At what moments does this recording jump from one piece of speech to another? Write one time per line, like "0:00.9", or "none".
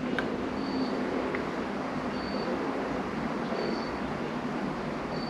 none